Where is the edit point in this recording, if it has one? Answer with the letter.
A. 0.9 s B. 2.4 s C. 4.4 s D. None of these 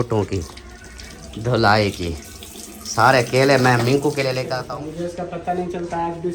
C